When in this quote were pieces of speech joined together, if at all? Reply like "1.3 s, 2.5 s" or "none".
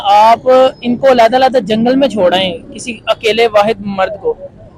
none

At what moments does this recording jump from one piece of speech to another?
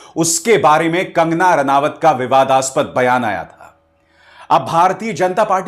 none

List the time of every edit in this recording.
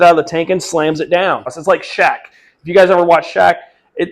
1.5 s

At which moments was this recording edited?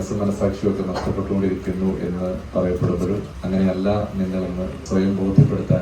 2.4 s, 3.3 s, 4.8 s

